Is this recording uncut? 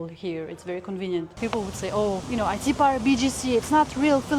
no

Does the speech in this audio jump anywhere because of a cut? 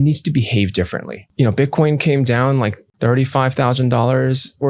yes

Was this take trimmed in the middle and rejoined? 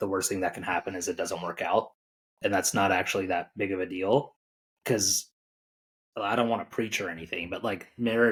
no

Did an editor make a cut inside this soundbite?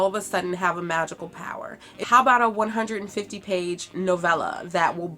yes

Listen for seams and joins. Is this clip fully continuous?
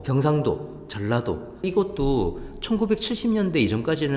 yes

